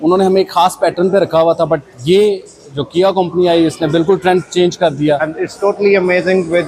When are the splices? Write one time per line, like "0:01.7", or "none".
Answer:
0:05.3